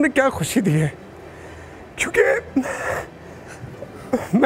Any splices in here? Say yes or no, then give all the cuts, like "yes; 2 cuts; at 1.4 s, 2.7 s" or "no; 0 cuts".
no; 0 cuts